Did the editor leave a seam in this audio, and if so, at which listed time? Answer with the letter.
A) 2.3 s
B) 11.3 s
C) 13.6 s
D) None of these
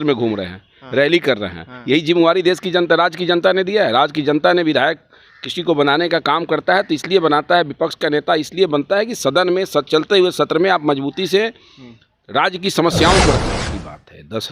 C